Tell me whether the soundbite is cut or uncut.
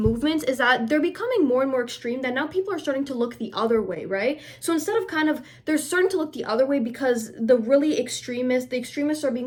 uncut